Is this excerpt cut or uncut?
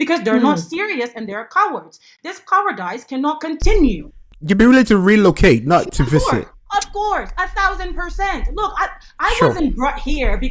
cut